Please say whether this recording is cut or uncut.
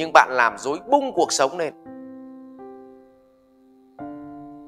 cut